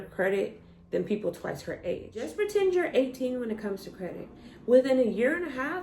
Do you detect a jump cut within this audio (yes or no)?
yes